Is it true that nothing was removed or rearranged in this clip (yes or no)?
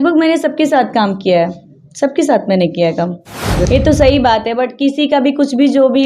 no